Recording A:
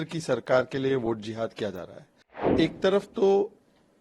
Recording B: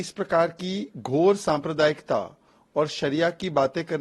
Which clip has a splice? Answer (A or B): A